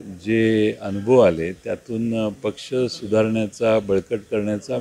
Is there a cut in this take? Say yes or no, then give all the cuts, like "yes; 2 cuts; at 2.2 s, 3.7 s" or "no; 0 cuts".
no; 0 cuts